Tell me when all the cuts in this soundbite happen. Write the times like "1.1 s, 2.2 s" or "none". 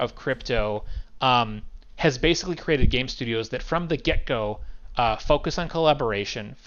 none